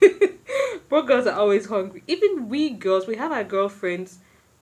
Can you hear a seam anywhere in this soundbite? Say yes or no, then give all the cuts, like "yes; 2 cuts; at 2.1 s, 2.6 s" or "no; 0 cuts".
no; 0 cuts